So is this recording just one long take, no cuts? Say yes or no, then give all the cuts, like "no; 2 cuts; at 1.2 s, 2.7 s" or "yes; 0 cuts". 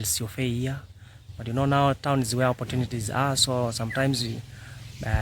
yes; 0 cuts